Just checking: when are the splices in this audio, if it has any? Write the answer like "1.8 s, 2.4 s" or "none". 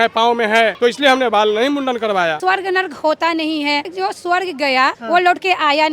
0.7 s, 2.4 s, 3.9 s, 5.0 s